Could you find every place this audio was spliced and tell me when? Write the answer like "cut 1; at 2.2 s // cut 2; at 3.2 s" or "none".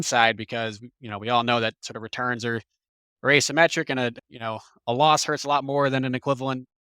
cut 1; at 4.2 s

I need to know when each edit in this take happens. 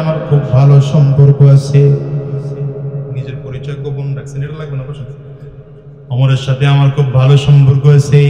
none

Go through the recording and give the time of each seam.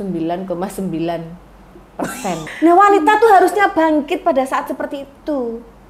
cut 1; at 2.4 s

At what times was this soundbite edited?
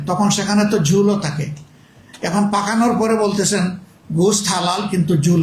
none

